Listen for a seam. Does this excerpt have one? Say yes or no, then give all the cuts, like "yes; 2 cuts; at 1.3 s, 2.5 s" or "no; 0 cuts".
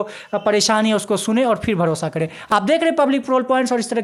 no; 0 cuts